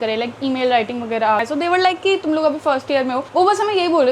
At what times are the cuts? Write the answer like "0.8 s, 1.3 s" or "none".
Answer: 1.4 s